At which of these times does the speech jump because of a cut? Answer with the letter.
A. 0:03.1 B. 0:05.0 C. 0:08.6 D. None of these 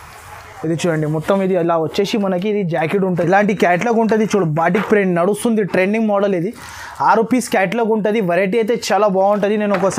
A